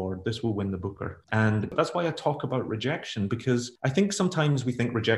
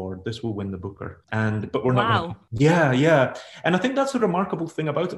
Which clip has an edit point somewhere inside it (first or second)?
first